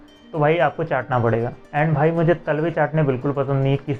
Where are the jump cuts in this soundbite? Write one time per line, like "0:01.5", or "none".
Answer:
none